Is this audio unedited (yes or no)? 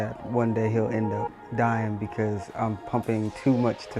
yes